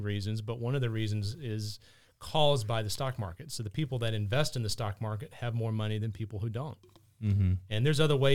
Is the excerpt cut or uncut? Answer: uncut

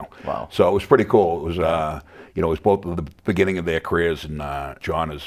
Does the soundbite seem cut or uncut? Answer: uncut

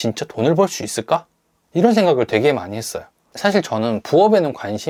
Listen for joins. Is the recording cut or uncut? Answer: uncut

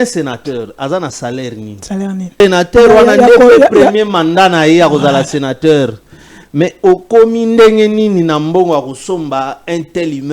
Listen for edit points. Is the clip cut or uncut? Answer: cut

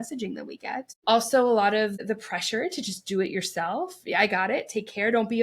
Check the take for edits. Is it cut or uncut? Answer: cut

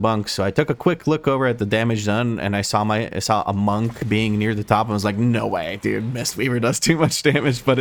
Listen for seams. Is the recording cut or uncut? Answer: uncut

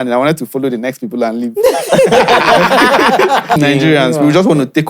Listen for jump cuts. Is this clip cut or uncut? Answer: cut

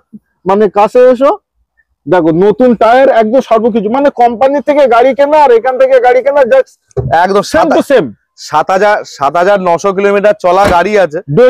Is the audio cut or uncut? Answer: uncut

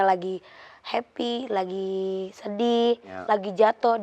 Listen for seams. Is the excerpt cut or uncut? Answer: uncut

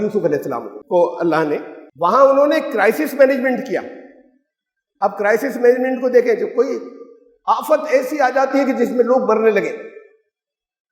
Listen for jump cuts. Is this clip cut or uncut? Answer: cut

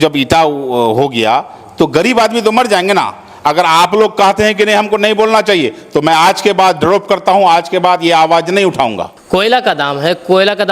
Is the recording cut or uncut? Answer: cut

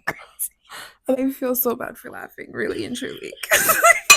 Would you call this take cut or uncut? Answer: cut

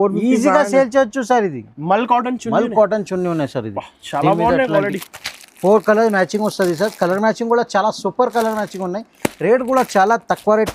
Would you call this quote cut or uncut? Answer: cut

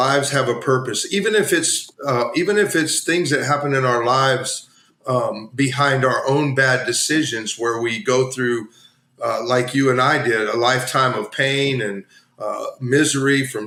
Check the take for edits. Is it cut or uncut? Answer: uncut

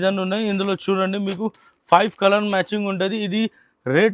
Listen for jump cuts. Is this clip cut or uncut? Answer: uncut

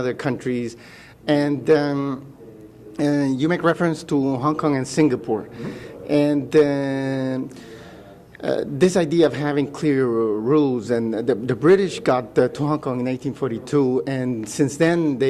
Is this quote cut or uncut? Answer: cut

